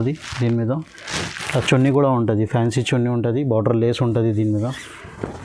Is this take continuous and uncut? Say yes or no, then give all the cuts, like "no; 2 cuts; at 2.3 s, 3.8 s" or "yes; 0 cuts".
yes; 0 cuts